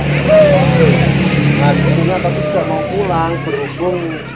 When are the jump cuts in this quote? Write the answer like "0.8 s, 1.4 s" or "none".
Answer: none